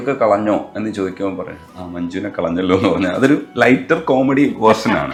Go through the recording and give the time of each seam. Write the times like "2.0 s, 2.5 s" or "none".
none